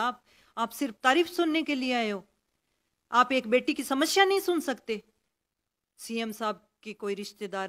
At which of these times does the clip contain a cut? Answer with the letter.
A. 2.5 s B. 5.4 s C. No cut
B